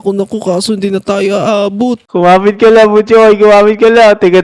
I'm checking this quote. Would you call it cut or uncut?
cut